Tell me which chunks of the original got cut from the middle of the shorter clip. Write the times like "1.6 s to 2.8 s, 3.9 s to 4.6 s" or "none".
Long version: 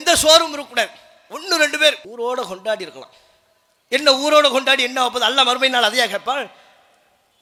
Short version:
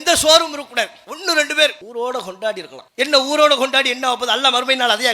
1.1 s to 1.3 s, 3.0 s to 3.7 s